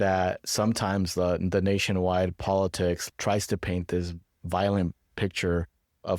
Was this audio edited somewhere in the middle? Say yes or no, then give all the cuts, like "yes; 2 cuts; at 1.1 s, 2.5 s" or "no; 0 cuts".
yes; 1 cut; at 3.0 s